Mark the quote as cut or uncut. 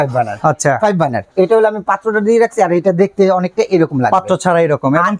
cut